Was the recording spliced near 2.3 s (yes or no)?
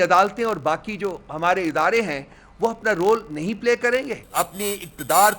no